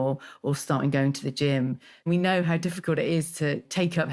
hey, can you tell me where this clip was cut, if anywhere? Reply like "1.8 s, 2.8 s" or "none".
2.0 s